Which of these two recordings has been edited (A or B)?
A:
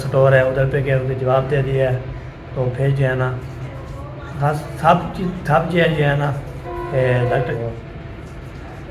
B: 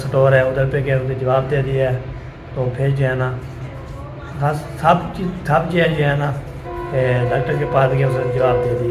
A